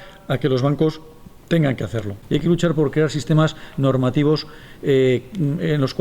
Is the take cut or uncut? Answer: cut